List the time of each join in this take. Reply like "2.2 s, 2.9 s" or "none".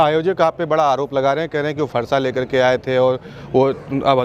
none